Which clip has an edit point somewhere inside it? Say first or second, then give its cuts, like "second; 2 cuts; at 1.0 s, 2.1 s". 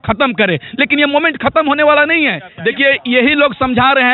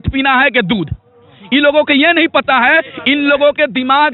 first; 1 cut; at 2.5 s